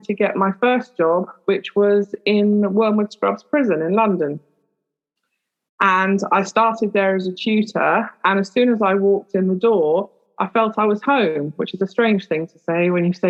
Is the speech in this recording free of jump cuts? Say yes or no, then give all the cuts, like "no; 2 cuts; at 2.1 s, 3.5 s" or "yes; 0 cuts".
yes; 0 cuts